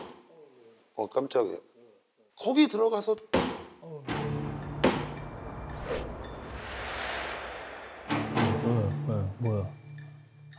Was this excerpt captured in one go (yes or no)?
yes